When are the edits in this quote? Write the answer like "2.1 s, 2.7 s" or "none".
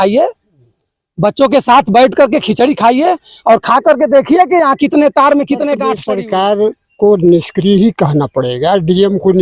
5.9 s